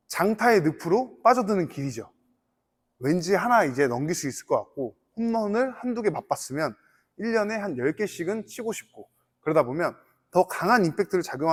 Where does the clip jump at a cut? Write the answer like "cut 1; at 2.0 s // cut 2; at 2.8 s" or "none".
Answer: none